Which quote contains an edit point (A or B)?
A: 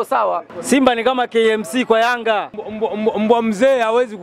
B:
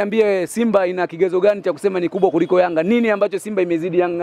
A